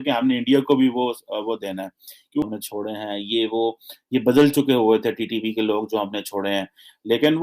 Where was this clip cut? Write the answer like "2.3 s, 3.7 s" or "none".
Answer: 2.4 s